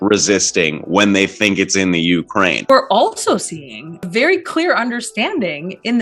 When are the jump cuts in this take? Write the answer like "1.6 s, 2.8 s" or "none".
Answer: 2.7 s, 4.1 s